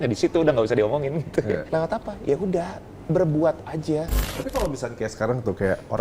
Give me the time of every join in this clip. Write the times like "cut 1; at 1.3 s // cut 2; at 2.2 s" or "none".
cut 1; at 1.6 s // cut 2; at 4.4 s